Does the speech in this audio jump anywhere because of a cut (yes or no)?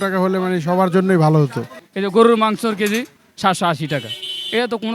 yes